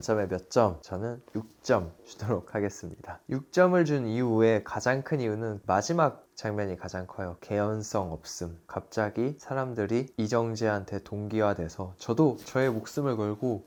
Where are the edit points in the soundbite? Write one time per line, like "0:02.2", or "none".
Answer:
none